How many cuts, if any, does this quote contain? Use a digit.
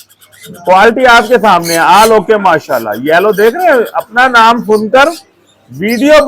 0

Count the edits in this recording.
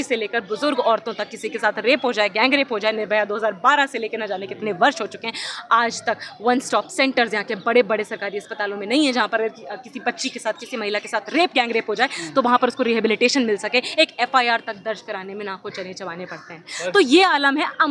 0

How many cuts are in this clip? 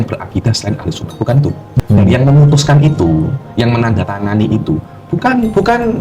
1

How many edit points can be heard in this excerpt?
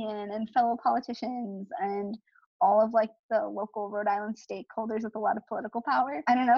0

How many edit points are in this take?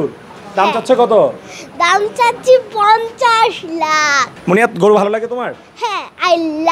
1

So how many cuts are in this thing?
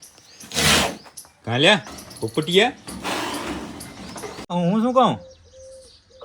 1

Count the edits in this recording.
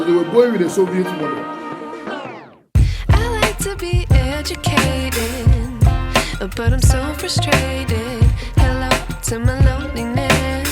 1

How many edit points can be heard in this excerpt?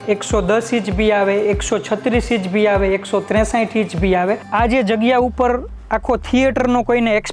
1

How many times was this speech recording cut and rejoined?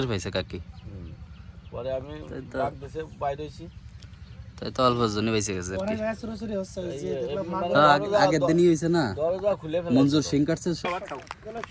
1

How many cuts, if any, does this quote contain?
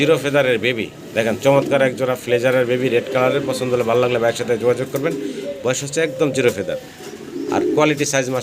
0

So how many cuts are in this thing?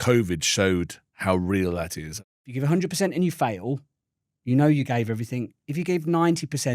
1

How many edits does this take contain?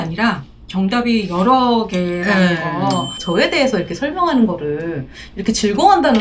1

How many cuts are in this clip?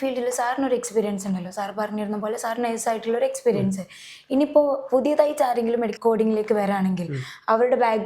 1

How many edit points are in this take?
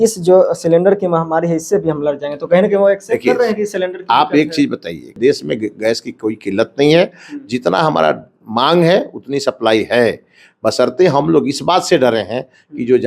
1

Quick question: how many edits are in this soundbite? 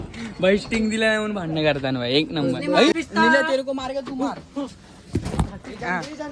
1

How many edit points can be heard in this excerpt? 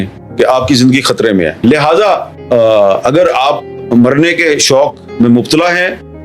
1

